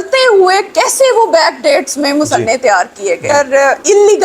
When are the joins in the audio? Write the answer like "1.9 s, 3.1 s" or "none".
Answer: 3.3 s